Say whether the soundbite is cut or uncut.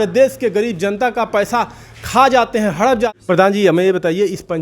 cut